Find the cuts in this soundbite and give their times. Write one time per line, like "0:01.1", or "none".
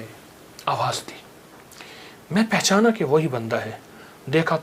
none